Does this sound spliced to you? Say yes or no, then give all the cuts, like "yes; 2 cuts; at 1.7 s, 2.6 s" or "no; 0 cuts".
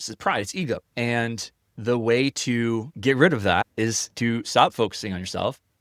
yes; 3 cuts; at 0.9 s, 2.9 s, 3.7 s